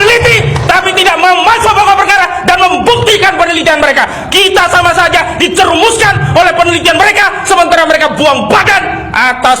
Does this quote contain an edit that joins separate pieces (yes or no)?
no